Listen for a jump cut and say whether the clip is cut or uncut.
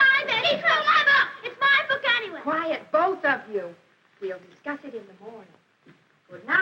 cut